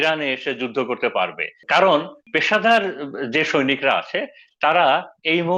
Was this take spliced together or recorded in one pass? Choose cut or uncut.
cut